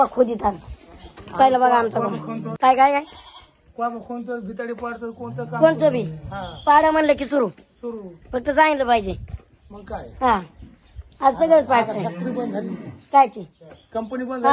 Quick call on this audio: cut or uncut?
cut